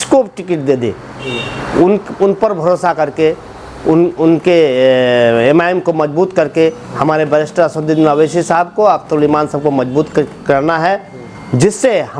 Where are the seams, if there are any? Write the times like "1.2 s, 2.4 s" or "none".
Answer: none